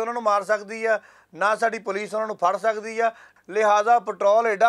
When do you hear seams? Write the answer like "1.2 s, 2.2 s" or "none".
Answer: 3.3 s